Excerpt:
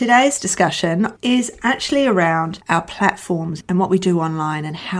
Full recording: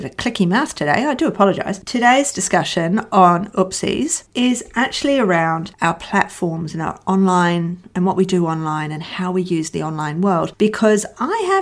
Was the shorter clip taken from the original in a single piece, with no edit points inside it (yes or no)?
no